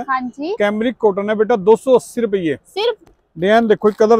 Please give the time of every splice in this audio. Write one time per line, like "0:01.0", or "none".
0:03.0

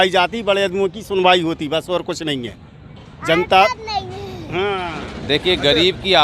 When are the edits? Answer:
none

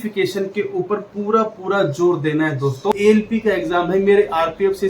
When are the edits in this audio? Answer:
0:02.9

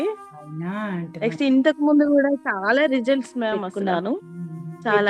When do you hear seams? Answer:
0:03.7

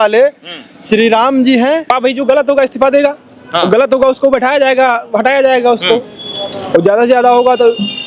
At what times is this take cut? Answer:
0:01.9

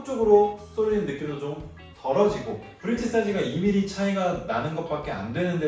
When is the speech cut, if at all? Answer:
0:02.7

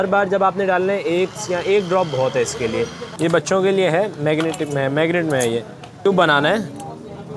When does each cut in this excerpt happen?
0:03.0
0:06.0

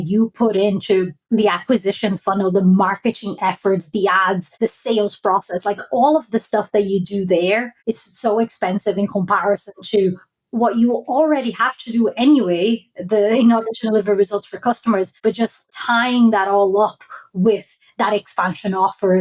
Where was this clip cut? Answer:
0:01.2
0:04.5
0:07.7
0:15.4

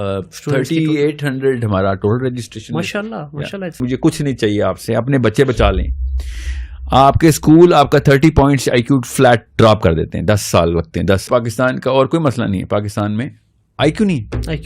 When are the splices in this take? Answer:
0:03.8
0:11.3

